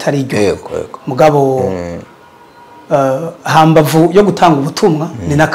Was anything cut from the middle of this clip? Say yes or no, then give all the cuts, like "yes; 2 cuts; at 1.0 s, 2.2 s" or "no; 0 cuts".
no; 0 cuts